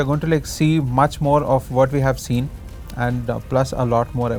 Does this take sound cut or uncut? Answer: uncut